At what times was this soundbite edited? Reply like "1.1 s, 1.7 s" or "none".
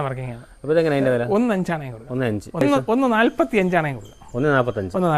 2.6 s